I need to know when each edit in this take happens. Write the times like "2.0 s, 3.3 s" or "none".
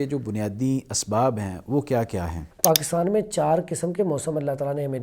2.4 s